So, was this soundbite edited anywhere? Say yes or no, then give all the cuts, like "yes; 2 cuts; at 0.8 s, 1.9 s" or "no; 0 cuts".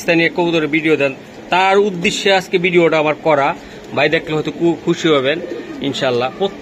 no; 0 cuts